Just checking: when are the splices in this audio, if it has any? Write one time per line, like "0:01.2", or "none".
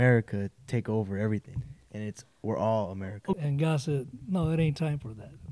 0:03.3